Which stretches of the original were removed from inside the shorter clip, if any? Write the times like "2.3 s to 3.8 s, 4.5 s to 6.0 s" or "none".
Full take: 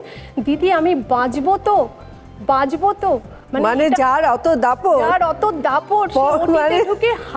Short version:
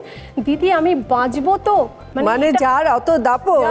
2.0 s to 3.4 s